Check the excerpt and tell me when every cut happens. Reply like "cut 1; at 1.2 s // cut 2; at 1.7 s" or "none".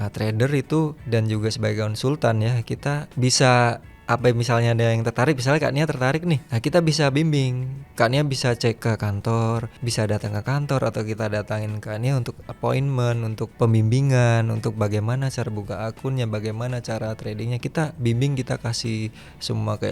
cut 1; at 1.0 s // cut 2; at 3.1 s // cut 3; at 3.9 s // cut 4; at 6.5 s // cut 5; at 8.8 s // cut 6; at 9.8 s // cut 7; at 13.5 s